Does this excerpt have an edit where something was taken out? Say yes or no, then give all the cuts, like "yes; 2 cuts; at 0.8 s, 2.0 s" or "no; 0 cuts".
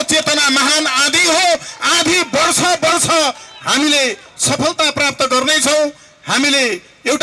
no; 0 cuts